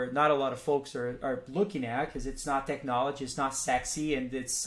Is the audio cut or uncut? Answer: uncut